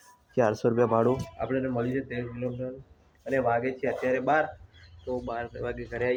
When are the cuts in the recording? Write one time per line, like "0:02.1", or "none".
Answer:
none